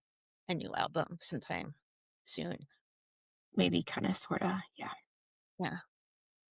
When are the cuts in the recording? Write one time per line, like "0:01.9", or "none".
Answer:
none